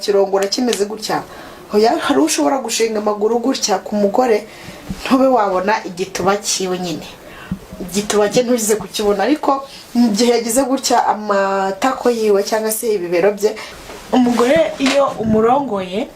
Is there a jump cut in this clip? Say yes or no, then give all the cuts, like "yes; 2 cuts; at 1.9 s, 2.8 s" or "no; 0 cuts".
yes; 1 cut; at 13.7 s